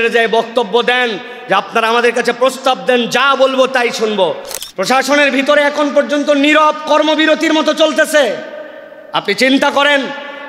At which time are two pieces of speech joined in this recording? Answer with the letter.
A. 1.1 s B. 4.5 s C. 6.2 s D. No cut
B